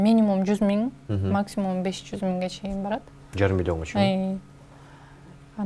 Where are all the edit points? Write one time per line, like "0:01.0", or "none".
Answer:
none

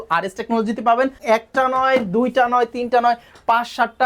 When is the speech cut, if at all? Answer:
0:01.2

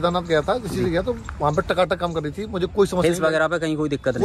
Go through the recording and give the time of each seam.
none

